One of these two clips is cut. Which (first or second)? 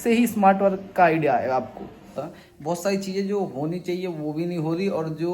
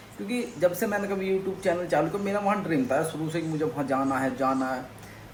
first